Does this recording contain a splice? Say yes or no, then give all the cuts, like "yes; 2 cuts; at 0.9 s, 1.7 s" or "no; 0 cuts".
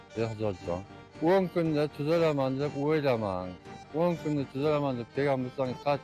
yes; 1 cut; at 1.0 s